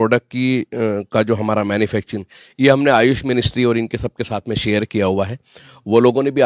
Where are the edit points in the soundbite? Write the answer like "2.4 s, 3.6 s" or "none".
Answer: none

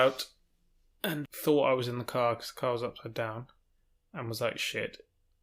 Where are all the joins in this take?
1.3 s

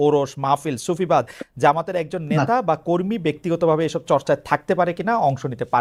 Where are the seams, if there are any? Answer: none

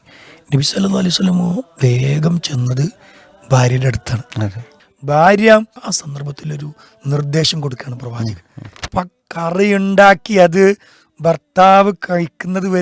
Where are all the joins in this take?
4.7 s, 5.8 s, 8.8 s

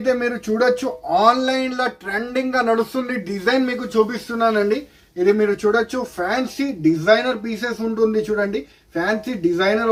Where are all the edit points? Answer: none

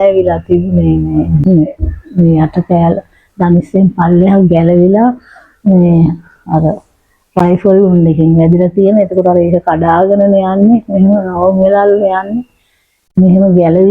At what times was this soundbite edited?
1.4 s

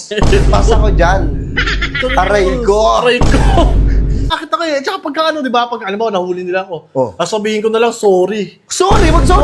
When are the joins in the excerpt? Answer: 4.3 s

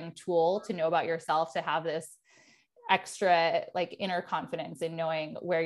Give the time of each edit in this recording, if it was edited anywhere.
none

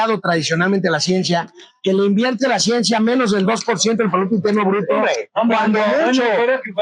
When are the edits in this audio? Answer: none

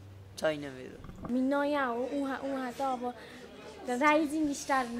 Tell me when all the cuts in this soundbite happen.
1.1 s

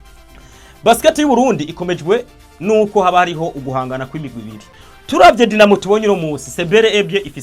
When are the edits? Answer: 4.6 s

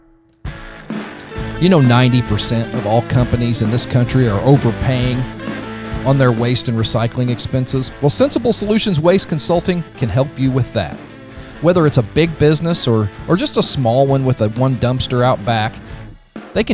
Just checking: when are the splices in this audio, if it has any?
none

